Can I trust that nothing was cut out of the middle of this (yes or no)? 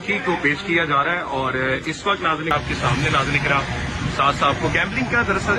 no